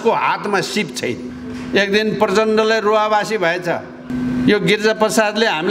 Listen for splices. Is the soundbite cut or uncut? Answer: cut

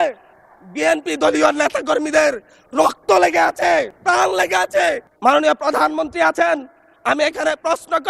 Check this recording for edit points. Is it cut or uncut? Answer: cut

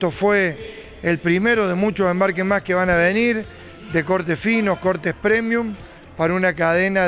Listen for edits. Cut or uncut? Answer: uncut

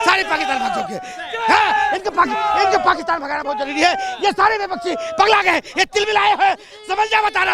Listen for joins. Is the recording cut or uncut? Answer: uncut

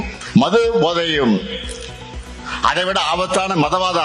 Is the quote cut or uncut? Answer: uncut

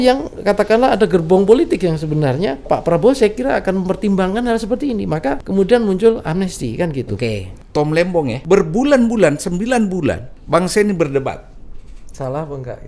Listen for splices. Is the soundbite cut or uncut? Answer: cut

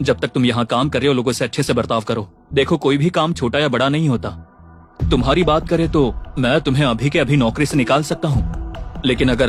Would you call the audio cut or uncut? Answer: uncut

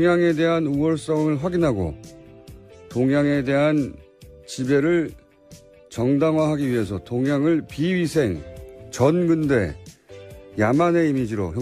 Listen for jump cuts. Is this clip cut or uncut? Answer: uncut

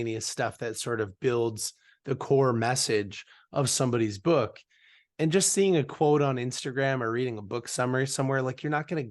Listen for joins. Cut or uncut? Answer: uncut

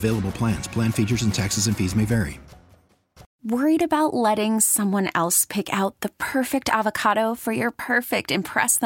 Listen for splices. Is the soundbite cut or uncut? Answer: cut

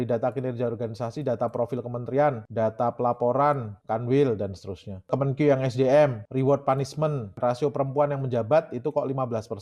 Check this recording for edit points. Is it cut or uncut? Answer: cut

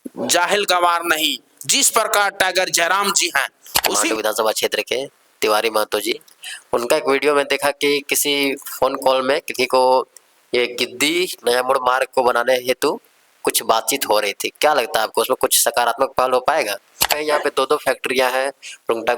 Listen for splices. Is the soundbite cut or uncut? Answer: cut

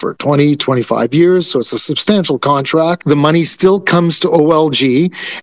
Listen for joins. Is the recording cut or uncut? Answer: cut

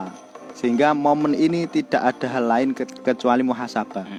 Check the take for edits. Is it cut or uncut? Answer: uncut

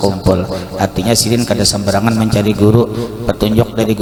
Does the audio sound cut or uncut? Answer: uncut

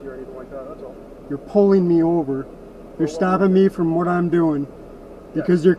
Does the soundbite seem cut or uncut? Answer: uncut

